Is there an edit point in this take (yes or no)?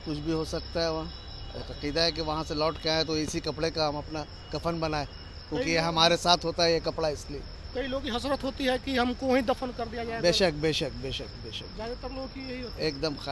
no